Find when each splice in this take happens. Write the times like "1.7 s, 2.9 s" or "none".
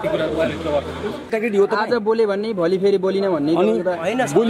1.3 s